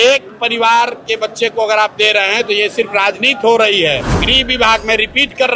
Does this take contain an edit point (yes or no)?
yes